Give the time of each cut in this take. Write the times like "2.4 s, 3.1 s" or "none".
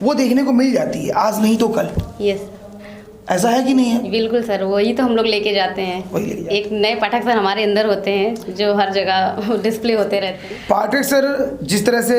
10.4 s